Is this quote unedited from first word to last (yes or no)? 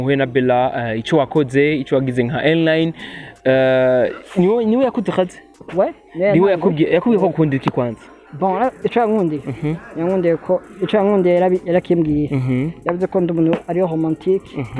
yes